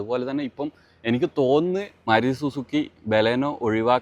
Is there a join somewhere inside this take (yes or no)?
yes